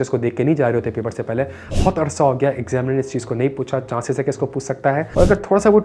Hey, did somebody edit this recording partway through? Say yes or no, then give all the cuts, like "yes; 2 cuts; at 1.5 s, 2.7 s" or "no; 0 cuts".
yes; 2 cuts; at 1.6 s, 5.1 s